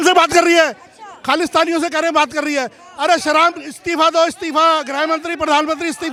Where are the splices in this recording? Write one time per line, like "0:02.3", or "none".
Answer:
none